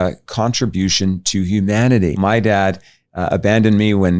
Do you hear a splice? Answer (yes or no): yes